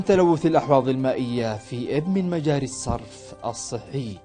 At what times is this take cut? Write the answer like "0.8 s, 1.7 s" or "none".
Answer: none